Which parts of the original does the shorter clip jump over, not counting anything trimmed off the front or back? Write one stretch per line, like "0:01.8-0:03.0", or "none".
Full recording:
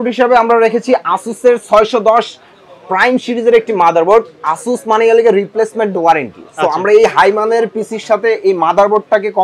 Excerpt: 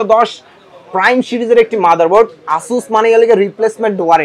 none